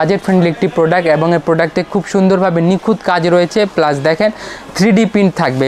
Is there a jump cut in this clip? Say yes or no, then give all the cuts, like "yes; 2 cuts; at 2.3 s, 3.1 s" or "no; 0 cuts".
no; 0 cuts